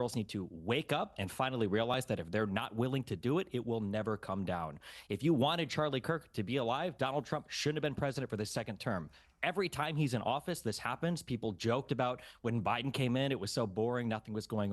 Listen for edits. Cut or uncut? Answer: cut